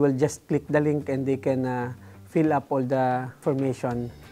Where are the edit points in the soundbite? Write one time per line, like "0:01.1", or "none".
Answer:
0:03.4